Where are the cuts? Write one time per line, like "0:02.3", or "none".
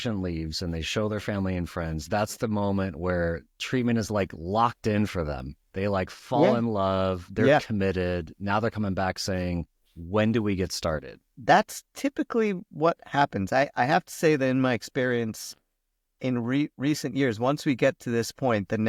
none

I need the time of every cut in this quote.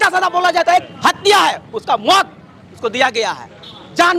0:00.9

